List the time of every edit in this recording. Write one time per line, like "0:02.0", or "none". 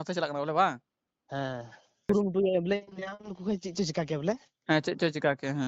0:02.1